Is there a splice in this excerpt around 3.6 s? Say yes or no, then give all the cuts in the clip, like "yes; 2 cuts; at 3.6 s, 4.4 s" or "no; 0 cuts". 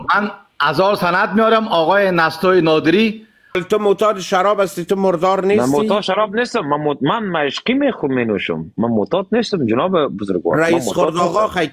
yes; 1 cut; at 3.6 s